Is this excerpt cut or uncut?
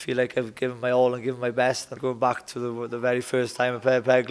cut